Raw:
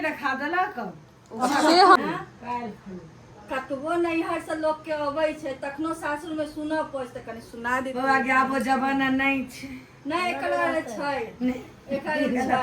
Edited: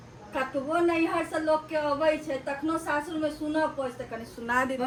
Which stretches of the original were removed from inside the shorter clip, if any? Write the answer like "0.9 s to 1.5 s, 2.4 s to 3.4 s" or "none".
none

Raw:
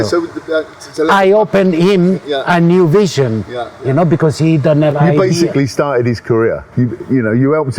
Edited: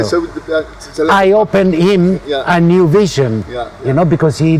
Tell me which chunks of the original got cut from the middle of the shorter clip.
none

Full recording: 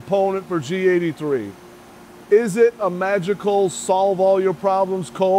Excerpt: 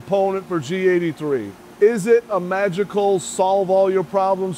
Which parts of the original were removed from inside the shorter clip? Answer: 1.6 s to 2.1 s

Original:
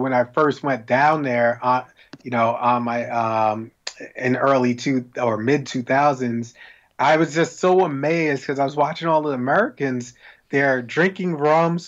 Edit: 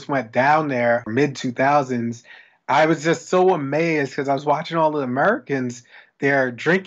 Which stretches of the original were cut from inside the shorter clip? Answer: 1.6 s to 5.4 s

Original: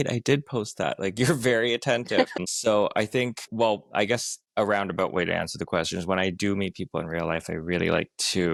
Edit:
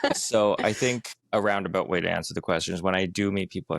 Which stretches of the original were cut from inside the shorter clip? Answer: 3.4 s to 4.3 s

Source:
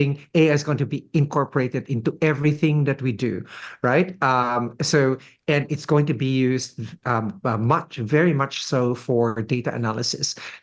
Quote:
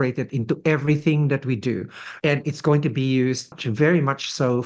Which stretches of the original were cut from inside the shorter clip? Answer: 3.6 s to 5.3 s, 6.9 s to 7.9 s

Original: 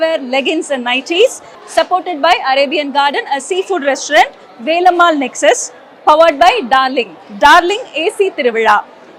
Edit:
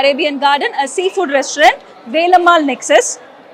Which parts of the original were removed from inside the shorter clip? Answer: none

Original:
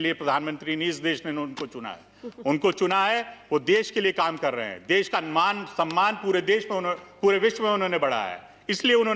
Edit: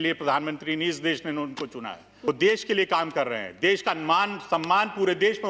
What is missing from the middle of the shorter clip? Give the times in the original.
2.1 s to 3.4 s

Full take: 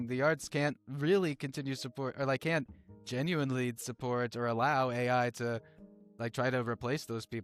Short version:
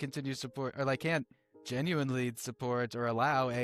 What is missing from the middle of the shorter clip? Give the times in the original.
none

